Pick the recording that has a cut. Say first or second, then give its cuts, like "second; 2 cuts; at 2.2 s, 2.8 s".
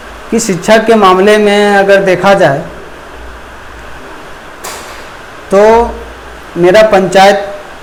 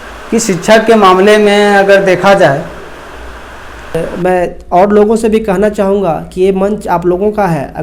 second; 1 cut; at 3.9 s